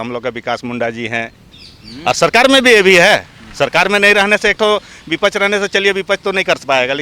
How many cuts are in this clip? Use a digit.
1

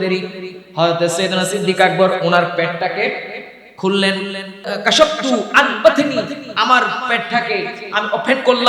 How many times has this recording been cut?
1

